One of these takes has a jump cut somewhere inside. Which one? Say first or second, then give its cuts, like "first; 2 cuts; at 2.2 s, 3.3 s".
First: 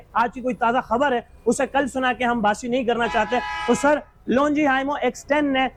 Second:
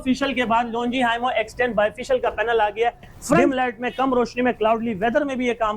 second; 1 cut; at 3.4 s